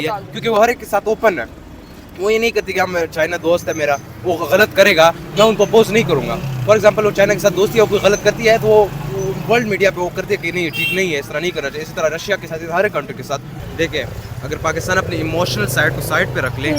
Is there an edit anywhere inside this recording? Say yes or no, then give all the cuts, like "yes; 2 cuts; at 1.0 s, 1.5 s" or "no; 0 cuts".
yes; 1 cut; at 13.6 s